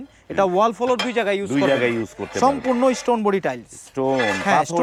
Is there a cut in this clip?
no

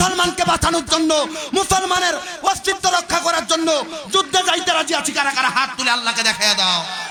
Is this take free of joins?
yes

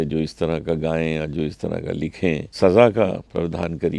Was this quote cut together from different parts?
yes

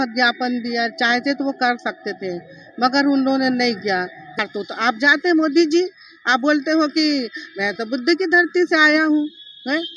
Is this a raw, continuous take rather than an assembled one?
no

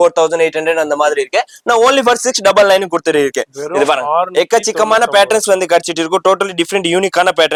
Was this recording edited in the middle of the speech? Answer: no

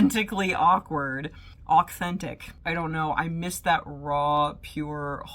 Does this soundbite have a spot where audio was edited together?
yes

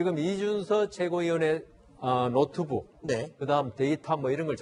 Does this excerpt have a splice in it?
no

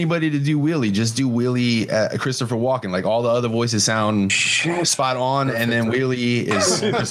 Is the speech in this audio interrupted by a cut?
no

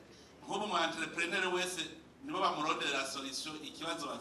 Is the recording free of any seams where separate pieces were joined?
yes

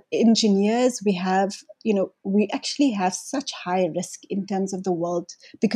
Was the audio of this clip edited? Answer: no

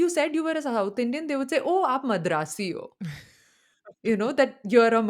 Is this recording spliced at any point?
no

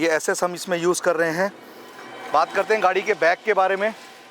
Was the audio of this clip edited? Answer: no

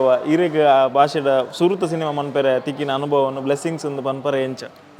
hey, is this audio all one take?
yes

